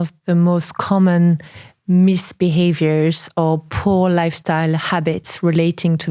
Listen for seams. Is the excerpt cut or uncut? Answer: uncut